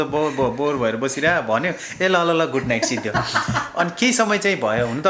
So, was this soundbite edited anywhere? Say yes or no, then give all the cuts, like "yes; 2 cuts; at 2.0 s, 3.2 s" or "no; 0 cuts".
no; 0 cuts